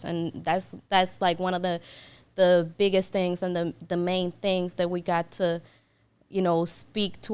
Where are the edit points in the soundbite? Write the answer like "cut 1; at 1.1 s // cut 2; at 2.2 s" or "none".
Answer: none